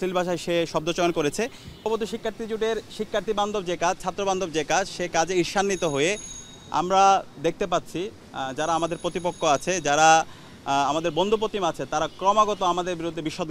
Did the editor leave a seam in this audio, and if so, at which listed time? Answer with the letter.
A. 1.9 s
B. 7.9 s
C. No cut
A